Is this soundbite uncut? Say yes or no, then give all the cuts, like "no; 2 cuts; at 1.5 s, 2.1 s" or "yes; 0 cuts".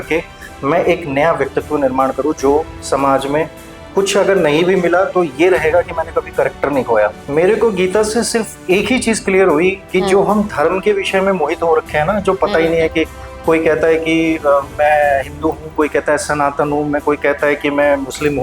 no; 1 cut; at 7.2 s